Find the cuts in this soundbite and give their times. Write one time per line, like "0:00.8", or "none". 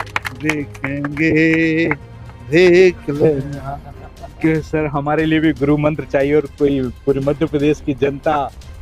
0:04.4